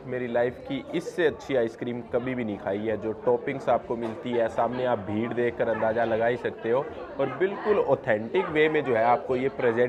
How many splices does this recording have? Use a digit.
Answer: 0